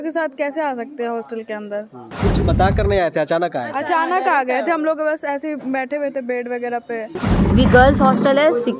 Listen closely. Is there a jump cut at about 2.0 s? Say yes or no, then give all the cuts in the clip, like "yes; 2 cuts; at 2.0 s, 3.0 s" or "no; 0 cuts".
yes; 2 cuts; at 2.0 s, 7.2 s